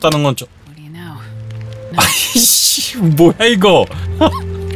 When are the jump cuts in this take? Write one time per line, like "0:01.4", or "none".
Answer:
0:01.9

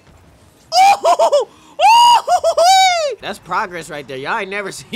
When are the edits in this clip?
0:03.2

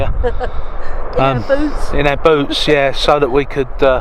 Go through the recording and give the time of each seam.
none

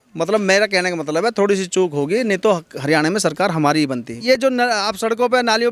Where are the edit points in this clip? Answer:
0:04.1

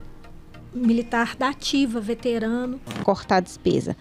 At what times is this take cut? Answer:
0:02.9

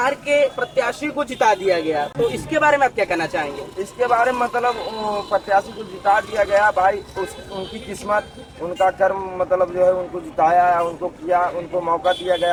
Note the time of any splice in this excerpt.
none

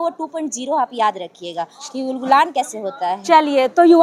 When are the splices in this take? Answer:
none

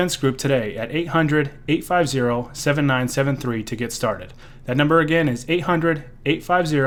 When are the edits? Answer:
none

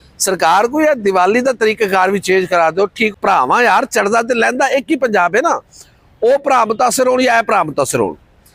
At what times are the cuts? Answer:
0:03.1

